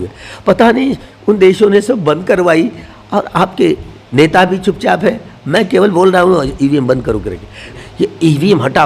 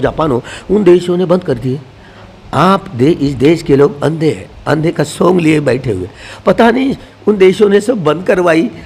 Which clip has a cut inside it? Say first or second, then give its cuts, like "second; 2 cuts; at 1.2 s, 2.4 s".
first; 1 cut; at 7.7 s